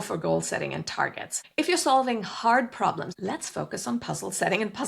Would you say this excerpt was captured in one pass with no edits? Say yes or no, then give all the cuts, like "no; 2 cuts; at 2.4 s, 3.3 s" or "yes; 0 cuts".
no; 2 cuts; at 1.4 s, 3.1 s